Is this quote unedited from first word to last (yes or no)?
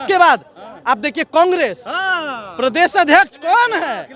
yes